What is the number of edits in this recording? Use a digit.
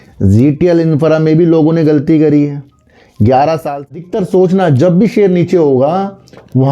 1